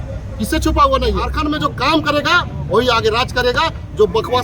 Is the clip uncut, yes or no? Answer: no